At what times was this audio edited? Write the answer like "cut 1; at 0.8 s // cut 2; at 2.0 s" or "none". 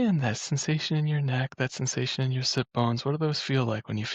none

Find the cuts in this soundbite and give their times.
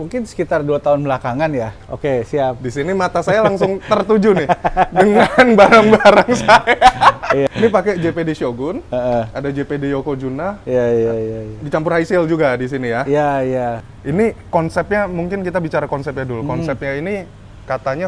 cut 1; at 1.7 s // cut 2; at 7.5 s // cut 3; at 13.9 s

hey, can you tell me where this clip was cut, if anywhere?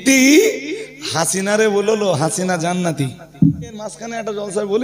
cut 1; at 3.8 s

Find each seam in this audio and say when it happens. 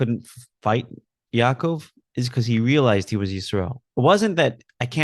cut 1; at 3.8 s

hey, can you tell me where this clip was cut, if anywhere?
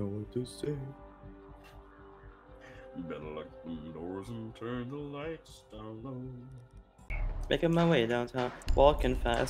cut 1; at 7.3 s

